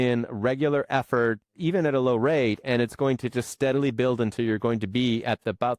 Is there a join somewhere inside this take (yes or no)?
no